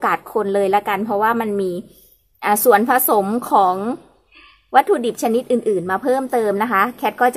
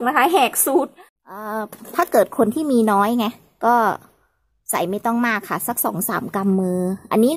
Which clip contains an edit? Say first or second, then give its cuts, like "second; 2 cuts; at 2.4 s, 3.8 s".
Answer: second; 1 cut; at 1.3 s